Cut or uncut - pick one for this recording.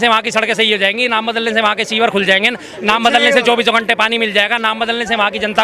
uncut